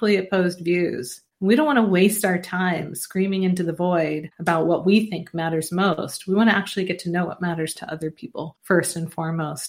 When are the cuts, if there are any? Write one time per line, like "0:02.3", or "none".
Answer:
none